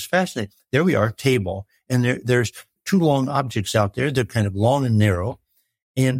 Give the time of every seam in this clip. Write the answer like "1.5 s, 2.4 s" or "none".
2.7 s